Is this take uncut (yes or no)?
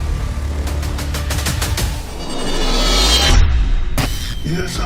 no